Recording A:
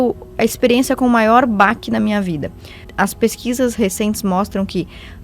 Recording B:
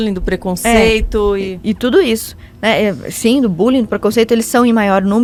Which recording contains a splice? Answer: A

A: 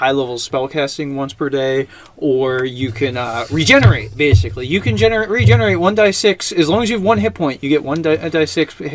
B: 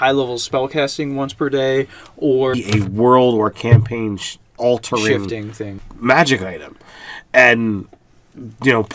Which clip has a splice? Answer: A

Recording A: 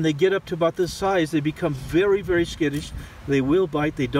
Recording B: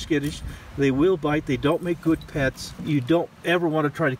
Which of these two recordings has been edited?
B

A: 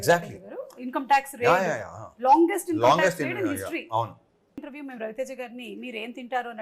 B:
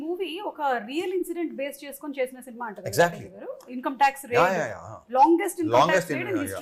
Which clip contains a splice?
A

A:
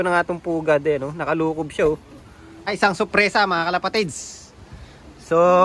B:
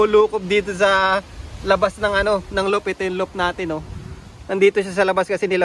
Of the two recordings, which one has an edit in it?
A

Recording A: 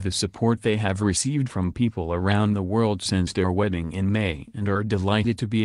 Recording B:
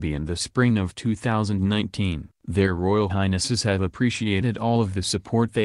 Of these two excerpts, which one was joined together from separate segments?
B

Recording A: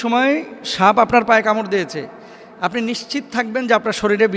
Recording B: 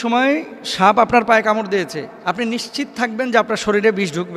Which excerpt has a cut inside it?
B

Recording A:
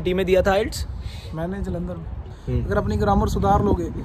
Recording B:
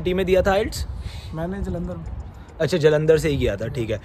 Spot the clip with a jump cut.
A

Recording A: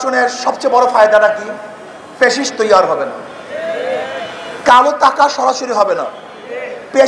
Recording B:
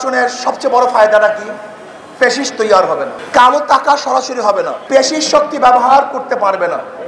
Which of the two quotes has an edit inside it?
B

